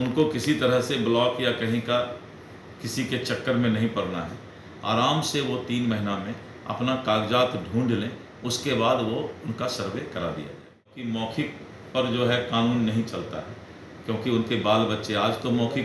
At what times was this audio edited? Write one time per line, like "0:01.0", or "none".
0:10.9